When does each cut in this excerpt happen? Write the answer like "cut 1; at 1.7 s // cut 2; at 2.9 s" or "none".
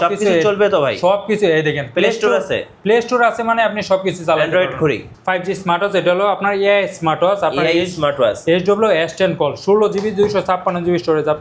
cut 1; at 5.1 s

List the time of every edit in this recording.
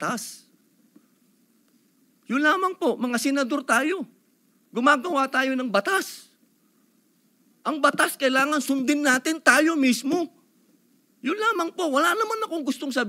none

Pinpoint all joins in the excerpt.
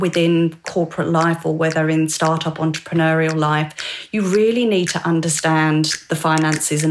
none

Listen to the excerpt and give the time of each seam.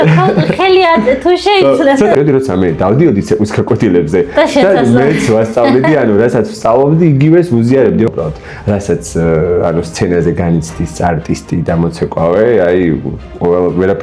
cut 1; at 2.1 s // cut 2; at 8.1 s

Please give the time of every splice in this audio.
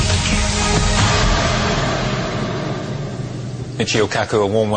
cut 1; at 2.4 s

